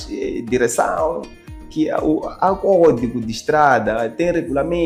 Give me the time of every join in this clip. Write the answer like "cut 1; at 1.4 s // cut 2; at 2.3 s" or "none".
none